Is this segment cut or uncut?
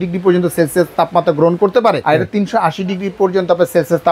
cut